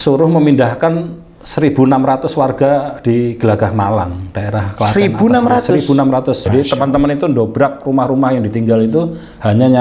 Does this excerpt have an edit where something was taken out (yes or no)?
yes